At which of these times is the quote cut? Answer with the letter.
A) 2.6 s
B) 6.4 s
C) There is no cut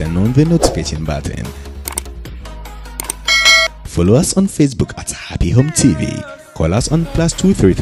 C